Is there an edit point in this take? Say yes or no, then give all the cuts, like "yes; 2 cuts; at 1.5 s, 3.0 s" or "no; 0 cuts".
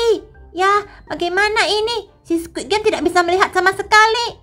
no; 0 cuts